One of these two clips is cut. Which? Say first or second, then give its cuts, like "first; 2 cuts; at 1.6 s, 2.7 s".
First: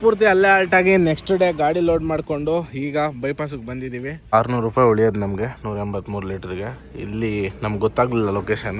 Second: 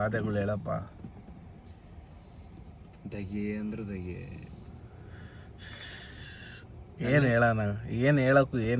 first; 1 cut; at 4.3 s